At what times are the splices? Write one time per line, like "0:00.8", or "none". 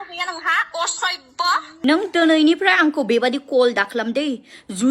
0:01.7